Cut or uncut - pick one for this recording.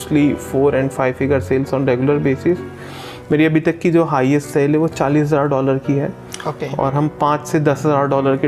uncut